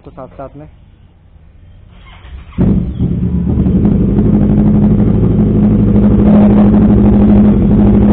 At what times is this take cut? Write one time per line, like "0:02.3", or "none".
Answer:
none